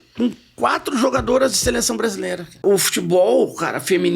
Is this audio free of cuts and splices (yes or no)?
no